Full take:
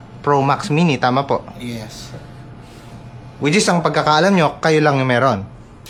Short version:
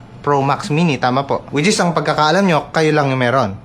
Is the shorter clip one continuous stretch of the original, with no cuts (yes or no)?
no